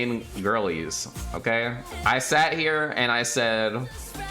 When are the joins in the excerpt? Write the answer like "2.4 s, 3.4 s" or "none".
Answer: 1.9 s